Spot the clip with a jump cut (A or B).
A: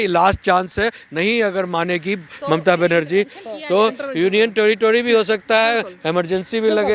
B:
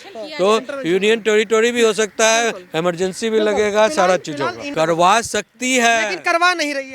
B